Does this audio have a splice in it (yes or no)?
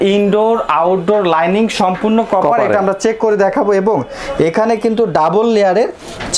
no